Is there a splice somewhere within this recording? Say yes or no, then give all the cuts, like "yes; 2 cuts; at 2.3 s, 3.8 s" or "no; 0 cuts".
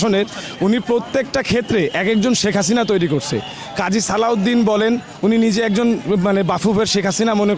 no; 0 cuts